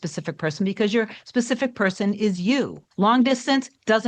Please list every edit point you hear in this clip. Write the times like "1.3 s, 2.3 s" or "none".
2.8 s

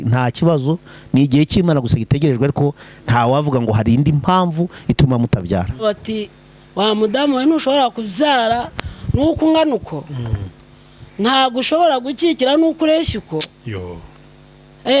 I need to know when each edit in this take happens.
5.8 s

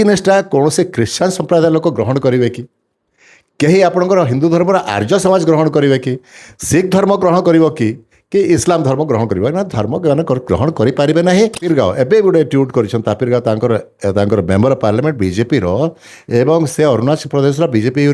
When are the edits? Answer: 11.6 s

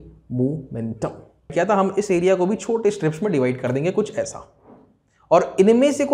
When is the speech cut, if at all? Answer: 1.5 s

